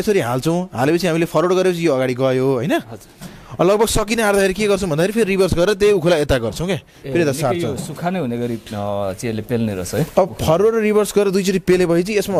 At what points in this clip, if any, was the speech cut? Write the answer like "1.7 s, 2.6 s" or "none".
none